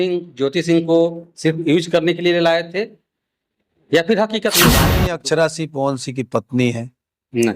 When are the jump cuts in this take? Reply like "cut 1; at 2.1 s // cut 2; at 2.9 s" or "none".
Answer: cut 1; at 4.8 s